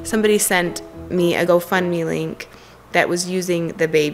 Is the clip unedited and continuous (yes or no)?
no